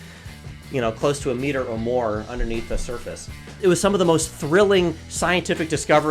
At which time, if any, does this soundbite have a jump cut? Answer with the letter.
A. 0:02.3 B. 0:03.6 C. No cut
B